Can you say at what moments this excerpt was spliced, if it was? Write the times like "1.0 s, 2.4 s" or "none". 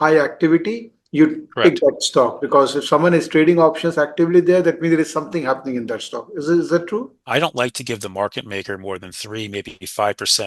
7.2 s